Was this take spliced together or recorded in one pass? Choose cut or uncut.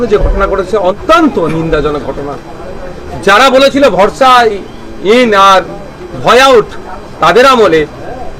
cut